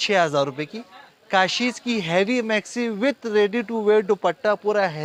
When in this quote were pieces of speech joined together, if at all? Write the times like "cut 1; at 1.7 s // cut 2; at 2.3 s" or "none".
none